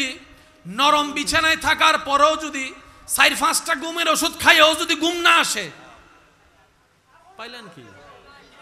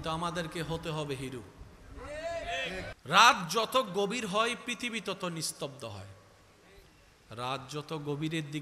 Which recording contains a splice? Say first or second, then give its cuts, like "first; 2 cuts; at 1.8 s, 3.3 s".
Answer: second; 1 cut; at 2.9 s